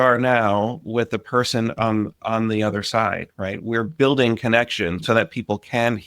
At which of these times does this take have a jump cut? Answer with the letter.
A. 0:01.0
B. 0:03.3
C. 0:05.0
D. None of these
C